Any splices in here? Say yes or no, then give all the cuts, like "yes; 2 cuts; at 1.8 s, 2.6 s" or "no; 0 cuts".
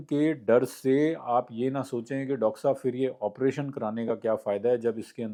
no; 0 cuts